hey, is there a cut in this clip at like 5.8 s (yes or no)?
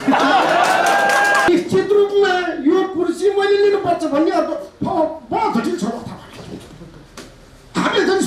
no